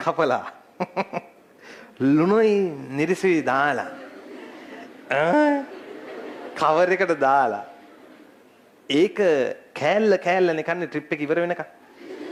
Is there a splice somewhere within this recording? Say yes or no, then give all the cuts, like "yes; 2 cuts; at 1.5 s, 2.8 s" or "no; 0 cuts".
no; 0 cuts